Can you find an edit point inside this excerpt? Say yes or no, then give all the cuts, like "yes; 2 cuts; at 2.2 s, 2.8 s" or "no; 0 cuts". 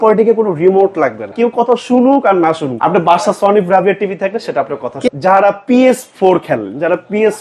yes; 3 cuts; at 1.3 s, 2.7 s, 5.0 s